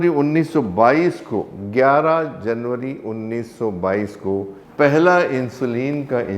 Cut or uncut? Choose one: cut